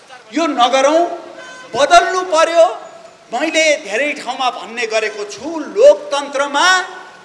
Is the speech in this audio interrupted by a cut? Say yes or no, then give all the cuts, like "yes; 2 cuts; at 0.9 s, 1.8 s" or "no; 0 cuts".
no; 0 cuts